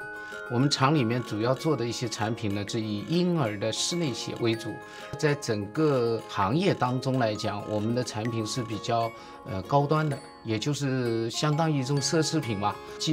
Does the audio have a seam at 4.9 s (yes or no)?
no